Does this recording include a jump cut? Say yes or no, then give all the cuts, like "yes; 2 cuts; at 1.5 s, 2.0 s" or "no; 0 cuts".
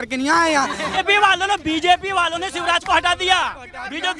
yes; 1 cut; at 1.0 s